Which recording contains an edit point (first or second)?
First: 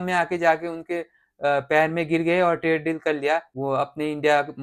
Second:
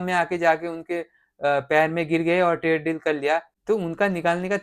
second